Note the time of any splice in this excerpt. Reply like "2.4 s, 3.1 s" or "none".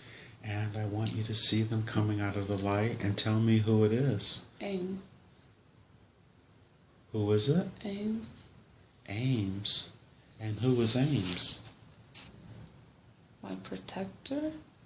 8.1 s